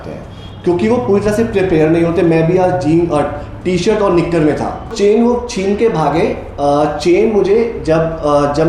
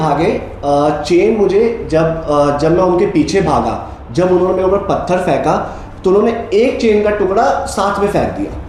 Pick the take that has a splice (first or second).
first